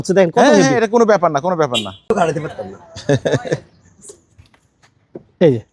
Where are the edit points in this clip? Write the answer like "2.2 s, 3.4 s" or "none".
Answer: 2.0 s